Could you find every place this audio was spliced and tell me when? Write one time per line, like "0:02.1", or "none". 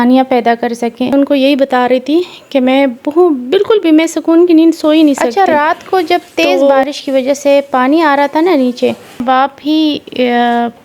0:01.1
0:05.3
0:09.2